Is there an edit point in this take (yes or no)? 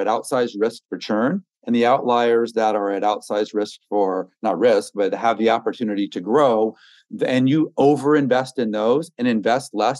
no